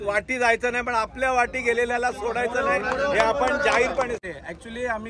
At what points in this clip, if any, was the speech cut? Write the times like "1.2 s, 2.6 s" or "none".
4.2 s